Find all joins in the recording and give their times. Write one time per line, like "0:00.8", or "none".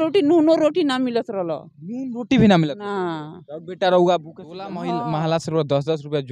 0:04.8